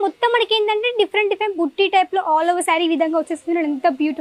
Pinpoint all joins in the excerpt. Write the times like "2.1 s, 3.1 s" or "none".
none